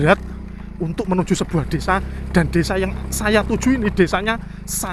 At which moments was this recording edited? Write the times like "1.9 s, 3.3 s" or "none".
none